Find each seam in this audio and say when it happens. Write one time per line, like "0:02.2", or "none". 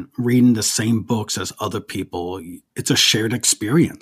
0:02.6